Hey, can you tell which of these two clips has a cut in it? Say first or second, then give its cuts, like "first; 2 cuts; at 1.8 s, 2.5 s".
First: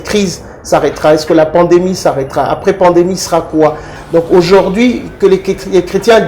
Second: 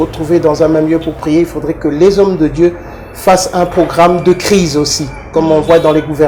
first; 1 cut; at 3.9 s